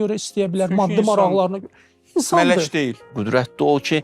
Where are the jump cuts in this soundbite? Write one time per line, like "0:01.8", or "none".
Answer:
0:03.1